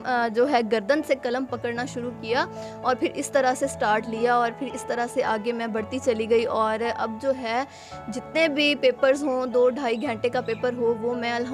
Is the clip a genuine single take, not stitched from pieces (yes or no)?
yes